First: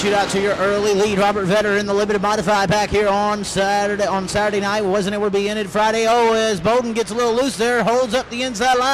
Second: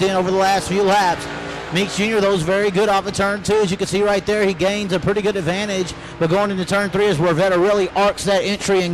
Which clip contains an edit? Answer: second; 1 cut; at 2.7 s

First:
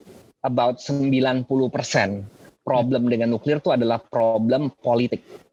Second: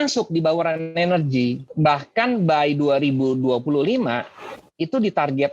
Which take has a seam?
second; 1 cut; at 1.7 s

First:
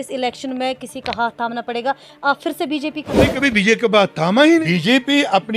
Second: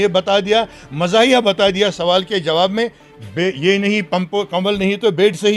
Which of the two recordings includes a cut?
first; 2 cuts; at 3.2 s, 4.6 s

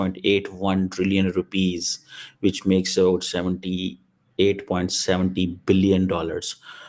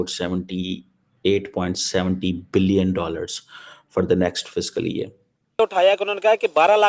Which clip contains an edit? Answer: second; 1 cut; at 5.6 s

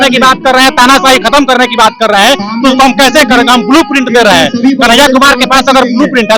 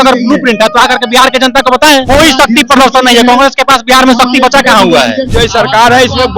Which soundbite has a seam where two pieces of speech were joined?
second; 2 cuts; at 2.0 s, 5.3 s

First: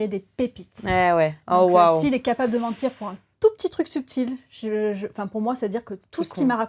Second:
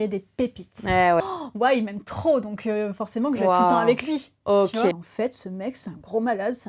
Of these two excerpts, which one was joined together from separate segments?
second; 2 cuts; at 1.2 s, 5.0 s

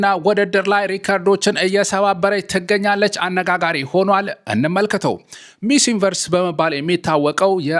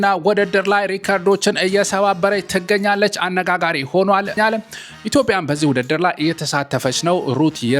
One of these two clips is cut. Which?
second; 1 cut; at 4.4 s

